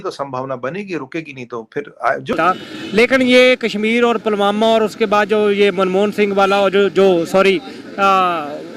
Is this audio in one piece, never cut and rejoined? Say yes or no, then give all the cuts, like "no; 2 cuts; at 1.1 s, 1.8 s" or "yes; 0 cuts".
no; 1 cut; at 2.3 s